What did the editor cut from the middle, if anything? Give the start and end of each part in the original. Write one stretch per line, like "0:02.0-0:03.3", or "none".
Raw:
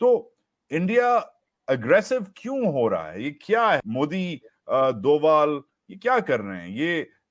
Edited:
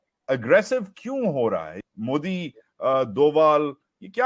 0:03.4-0:03.9